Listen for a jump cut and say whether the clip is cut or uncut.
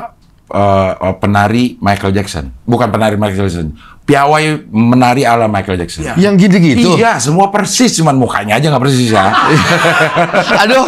cut